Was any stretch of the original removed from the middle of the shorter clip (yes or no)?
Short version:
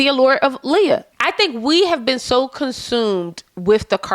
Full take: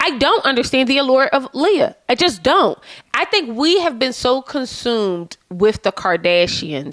yes